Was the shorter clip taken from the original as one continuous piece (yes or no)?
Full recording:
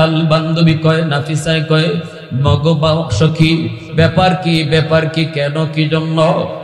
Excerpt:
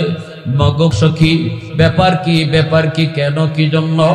no